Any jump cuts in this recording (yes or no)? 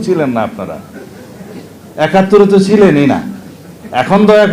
no